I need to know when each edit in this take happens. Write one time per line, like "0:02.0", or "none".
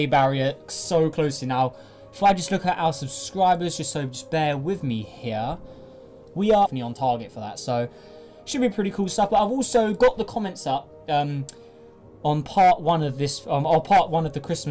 none